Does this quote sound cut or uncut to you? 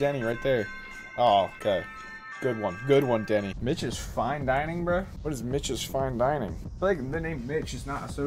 cut